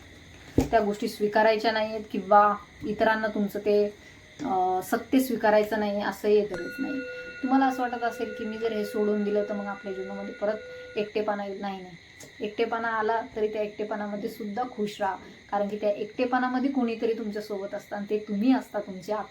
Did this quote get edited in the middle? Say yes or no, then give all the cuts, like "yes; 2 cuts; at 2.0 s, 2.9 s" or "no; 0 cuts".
yes; 1 cut; at 6.5 s